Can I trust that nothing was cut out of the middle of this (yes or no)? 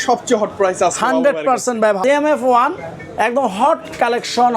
no